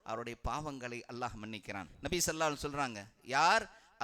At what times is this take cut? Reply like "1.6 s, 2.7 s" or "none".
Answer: 1.9 s